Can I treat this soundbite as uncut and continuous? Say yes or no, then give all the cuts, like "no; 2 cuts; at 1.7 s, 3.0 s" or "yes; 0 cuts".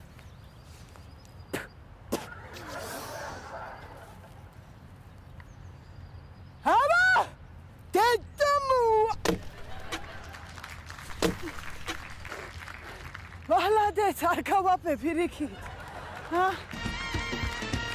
no; 1 cut; at 8.8 s